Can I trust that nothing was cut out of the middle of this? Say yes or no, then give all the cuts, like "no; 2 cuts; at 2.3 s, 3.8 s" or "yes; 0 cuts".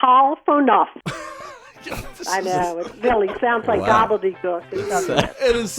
no; 1 cut; at 1.0 s